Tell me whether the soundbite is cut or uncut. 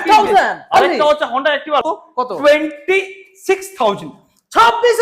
cut